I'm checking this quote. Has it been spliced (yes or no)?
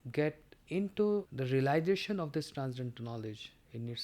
yes